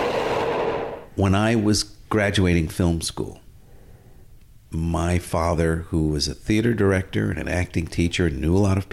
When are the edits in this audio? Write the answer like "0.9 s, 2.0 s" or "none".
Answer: 1.0 s